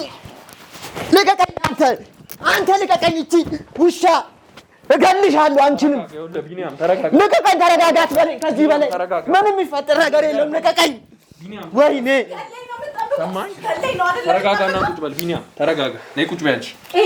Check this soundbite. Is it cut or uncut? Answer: uncut